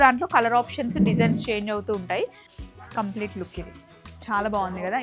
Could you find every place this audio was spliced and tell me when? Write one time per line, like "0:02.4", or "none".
0:02.4

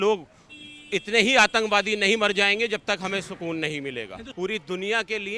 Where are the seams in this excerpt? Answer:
0:04.2

